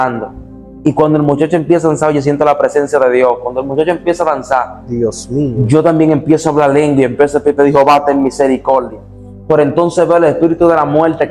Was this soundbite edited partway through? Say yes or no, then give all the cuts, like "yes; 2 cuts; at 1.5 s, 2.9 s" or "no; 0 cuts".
no; 0 cuts